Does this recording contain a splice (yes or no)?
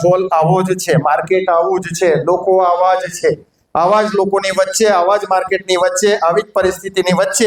no